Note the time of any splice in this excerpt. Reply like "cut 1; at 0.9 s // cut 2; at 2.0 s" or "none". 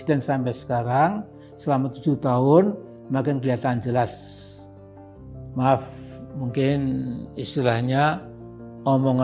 none

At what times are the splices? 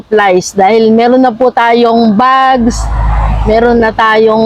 none

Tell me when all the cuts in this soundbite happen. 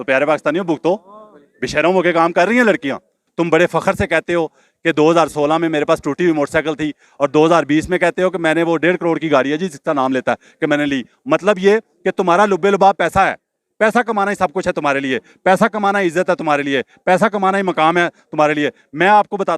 cut 1; at 3.2 s

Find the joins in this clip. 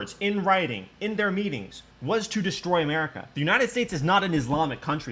cut 1; at 3.2 s

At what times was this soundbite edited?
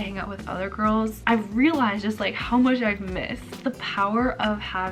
cut 1; at 1.2 s // cut 2; at 3.6 s

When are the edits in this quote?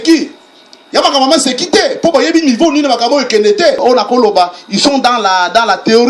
cut 1; at 3.8 s

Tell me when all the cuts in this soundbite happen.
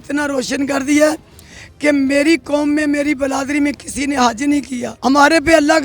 cut 1; at 4.8 s

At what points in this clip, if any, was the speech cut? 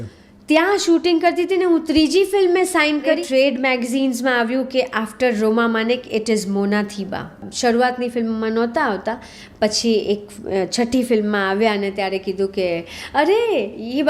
cut 1; at 3.2 s // cut 2; at 7.4 s

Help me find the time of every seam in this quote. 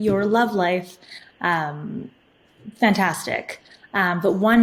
none

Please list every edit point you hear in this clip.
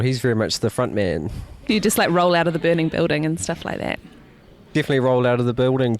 cut 1; at 1.5 s

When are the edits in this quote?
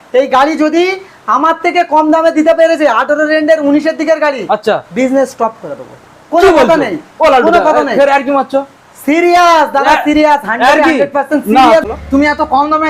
cut 1; at 11.8 s

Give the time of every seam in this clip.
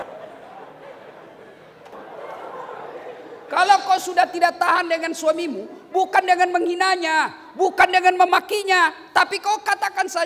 cut 1; at 1.9 s

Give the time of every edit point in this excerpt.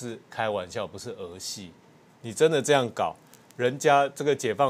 none

